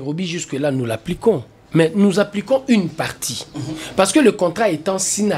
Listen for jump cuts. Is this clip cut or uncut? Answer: uncut